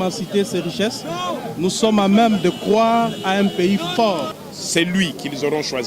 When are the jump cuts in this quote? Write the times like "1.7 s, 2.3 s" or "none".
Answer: 4.3 s